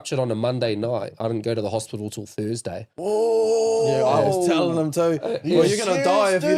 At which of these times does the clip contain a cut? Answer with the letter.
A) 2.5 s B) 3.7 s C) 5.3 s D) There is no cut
D